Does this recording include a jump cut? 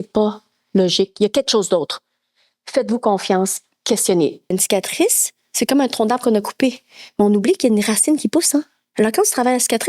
yes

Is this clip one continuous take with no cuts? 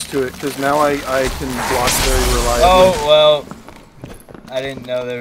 yes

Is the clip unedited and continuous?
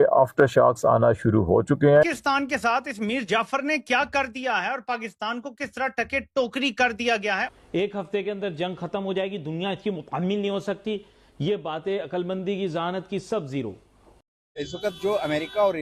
yes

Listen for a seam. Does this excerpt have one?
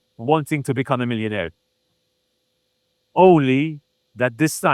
no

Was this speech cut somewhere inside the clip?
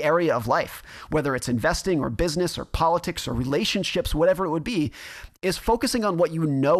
no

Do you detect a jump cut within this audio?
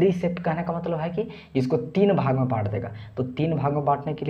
no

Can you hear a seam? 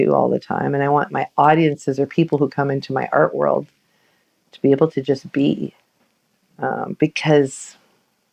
yes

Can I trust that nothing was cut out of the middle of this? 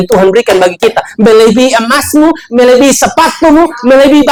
yes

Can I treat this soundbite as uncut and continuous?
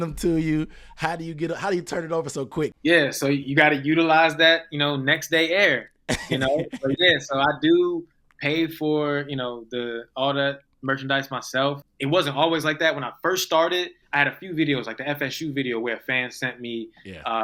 no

